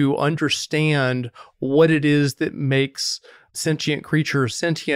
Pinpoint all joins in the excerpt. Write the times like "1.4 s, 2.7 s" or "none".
none